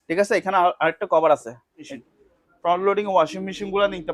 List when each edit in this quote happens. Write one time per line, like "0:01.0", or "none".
0:01.9